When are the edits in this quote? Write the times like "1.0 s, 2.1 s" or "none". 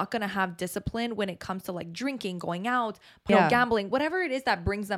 3.3 s